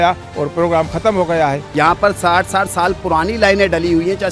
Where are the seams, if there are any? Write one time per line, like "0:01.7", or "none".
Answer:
0:01.6